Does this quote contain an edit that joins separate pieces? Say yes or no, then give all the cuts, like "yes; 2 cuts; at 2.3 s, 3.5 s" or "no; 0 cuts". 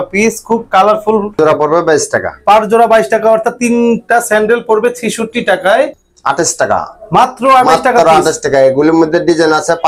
yes; 2 cuts; at 1.3 s, 6.1 s